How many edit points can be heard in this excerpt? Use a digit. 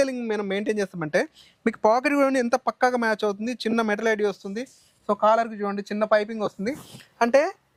0